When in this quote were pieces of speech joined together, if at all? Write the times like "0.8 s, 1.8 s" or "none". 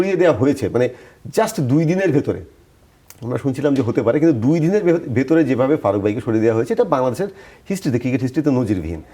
none